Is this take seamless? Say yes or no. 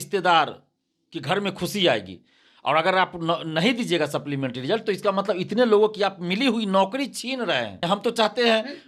no